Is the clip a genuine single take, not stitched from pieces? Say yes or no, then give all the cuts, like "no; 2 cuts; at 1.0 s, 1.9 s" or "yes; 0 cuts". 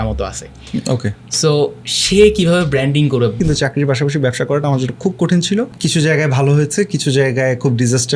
no; 2 cuts; at 3.4 s, 5.7 s